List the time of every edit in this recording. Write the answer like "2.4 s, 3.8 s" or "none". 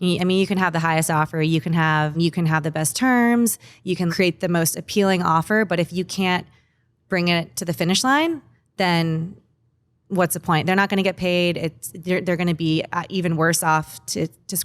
2.2 s, 4.1 s